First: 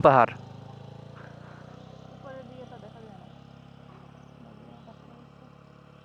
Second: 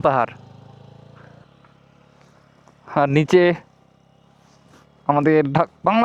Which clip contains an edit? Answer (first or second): second